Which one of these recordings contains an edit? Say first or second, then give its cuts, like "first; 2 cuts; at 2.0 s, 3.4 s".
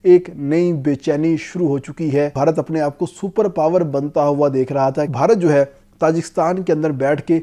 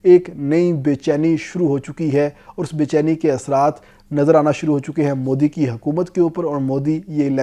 first; 2 cuts; at 2.3 s, 5.1 s